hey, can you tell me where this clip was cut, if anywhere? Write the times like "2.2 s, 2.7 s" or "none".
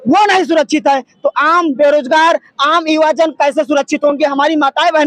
none

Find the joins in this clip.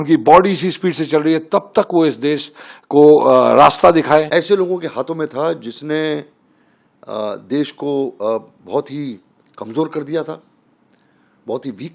4.3 s

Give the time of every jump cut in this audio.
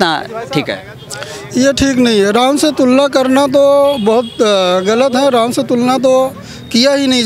none

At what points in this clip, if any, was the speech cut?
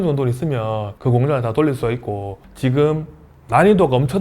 2.4 s

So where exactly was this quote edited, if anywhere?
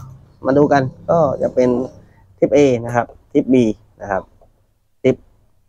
none

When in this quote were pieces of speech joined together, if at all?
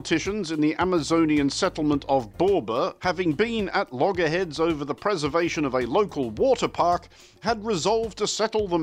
3.0 s

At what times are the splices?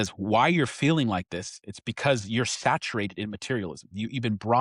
none

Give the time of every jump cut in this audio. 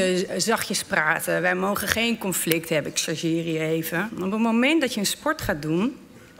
4.1 s

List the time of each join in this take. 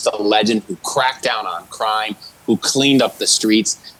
none

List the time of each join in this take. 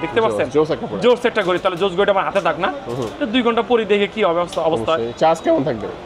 none

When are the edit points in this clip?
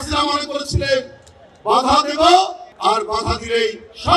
none

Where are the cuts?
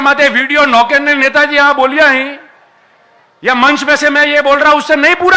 none

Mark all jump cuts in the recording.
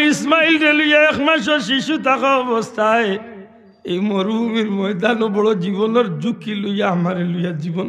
none

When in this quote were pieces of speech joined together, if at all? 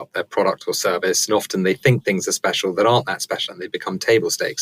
none

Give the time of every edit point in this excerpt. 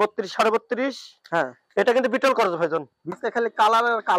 3.0 s

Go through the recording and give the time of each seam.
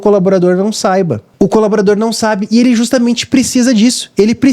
1.2 s

